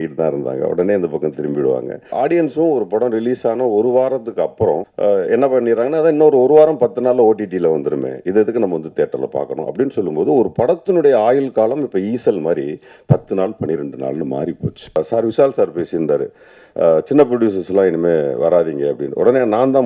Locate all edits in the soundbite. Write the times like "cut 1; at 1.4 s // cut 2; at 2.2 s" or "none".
cut 1; at 2.0 s // cut 2; at 4.9 s // cut 3; at 15.0 s